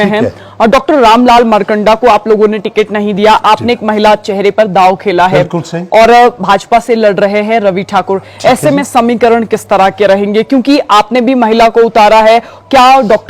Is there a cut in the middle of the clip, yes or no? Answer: no